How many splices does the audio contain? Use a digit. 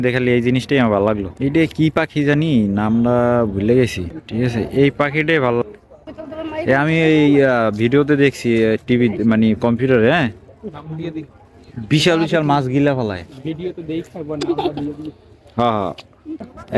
0